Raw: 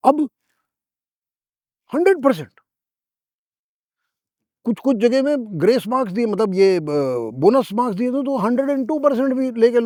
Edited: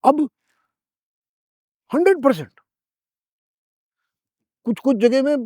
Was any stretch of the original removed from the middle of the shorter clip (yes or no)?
no